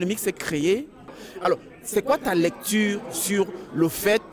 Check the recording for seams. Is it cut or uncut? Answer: cut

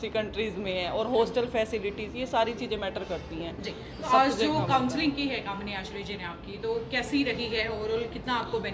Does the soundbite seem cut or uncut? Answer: uncut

